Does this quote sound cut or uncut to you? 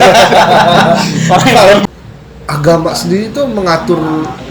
cut